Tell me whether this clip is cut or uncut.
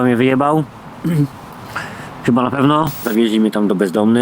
cut